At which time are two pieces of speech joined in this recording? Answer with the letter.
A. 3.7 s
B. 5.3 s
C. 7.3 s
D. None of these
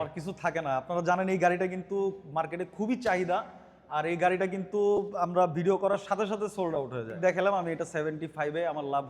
C